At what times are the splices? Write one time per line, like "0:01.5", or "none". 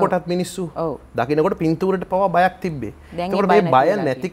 none

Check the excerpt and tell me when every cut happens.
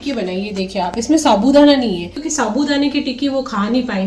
0:02.2

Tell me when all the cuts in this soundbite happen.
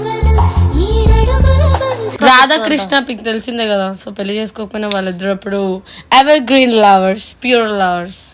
0:02.1

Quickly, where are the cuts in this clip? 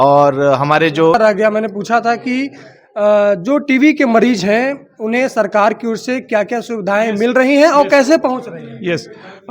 0:01.1

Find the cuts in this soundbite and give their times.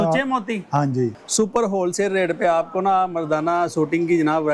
0:01.2

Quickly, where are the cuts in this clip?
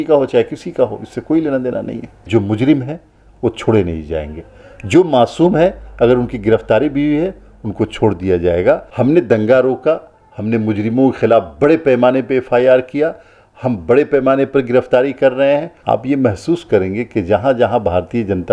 0:02.3
0:08.9
0:15.7

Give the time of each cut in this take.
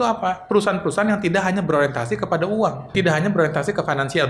0:02.9

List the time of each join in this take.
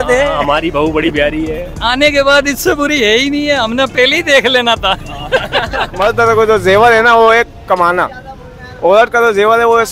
0:05.9

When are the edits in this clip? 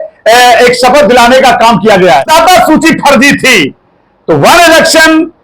0:02.3

